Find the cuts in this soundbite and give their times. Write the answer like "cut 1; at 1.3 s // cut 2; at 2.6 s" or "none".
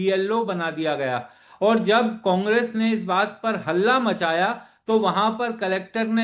none

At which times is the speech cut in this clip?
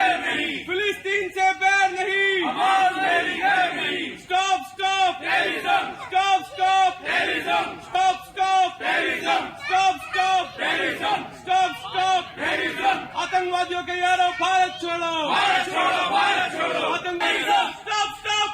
cut 1; at 17.2 s

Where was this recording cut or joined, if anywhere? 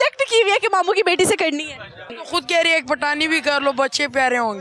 cut 1; at 2.2 s

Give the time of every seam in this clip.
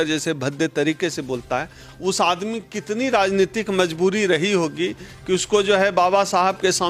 none

